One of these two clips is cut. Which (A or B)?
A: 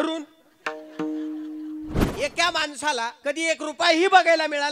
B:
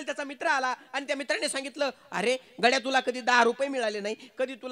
A